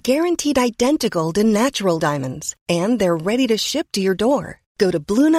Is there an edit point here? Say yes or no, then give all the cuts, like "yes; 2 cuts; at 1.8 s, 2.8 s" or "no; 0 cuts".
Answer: no; 0 cuts